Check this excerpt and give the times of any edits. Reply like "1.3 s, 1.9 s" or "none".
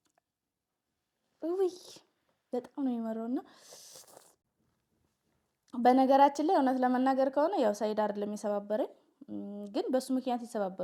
none